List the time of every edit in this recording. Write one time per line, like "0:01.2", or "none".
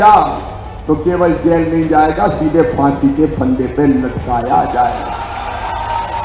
none